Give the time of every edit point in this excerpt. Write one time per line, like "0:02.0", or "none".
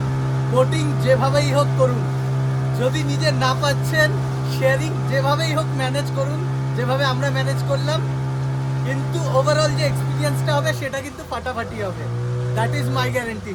none